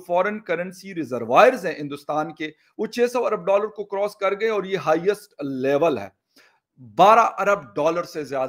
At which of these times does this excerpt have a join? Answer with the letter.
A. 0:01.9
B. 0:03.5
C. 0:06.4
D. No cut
C